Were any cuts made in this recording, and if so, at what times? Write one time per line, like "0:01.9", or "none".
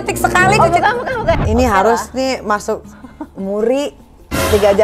0:01.4